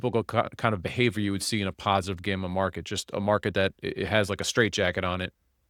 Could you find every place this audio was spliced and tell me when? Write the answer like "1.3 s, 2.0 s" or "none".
none